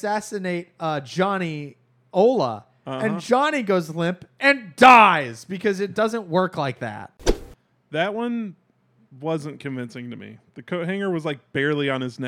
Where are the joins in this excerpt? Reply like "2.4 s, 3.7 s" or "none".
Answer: 7.3 s